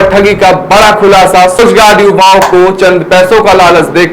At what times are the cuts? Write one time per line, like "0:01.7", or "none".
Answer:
0:01.6